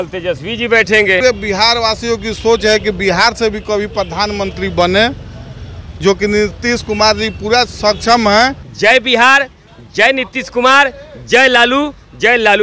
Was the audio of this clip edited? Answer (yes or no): yes